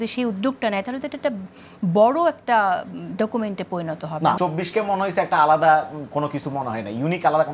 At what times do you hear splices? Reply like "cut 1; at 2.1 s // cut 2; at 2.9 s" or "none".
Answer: cut 1; at 4.4 s